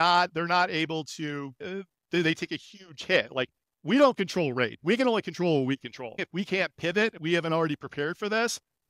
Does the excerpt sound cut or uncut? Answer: cut